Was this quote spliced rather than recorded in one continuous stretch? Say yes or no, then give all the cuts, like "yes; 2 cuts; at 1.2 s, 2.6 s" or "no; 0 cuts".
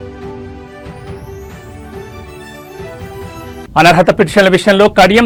no; 0 cuts